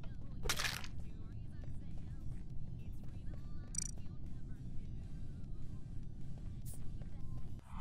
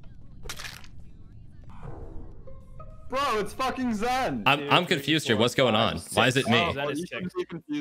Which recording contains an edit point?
second; 2 cuts; at 1.6 s, 4.4 s

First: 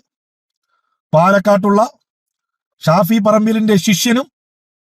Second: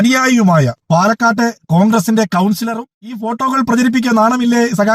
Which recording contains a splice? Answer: second; 1 cut; at 3.2 s

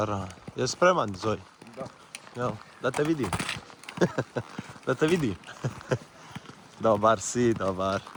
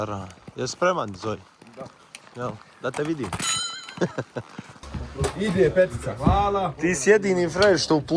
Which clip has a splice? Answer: second; 1 cut; at 4.7 s

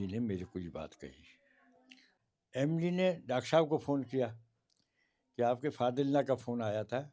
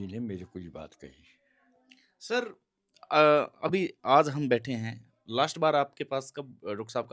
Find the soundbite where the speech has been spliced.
first; 1 cut; at 2.1 s

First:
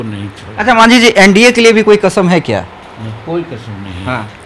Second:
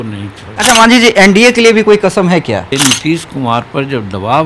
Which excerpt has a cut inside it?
second; 1 cut; at 2.7 s

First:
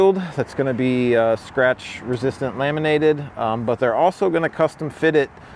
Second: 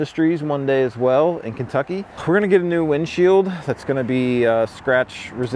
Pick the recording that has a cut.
second; 1 cut; at 2.1 s

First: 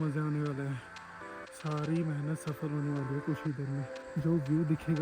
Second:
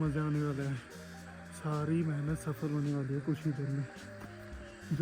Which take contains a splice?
first; 1 cut; at 4.0 s

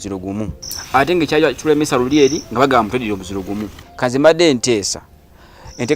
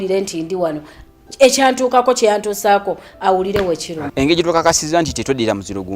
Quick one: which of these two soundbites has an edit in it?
second; 1 cut; at 4.0 s

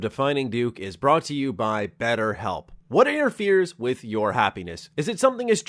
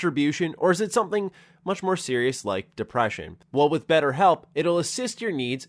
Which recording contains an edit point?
second; 1 cut; at 3.4 s

